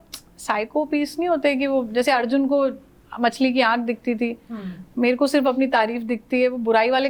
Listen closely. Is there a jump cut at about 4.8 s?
no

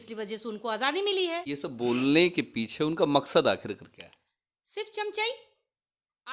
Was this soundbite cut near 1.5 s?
yes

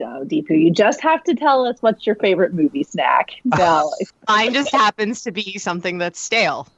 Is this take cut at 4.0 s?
yes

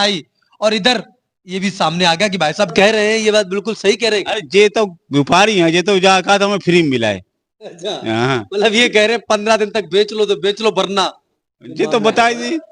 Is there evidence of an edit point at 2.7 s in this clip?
yes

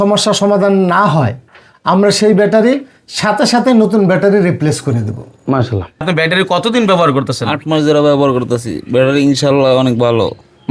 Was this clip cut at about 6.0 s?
yes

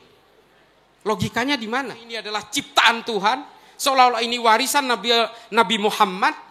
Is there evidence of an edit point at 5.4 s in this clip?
no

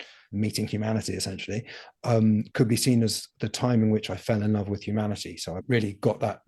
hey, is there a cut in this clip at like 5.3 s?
no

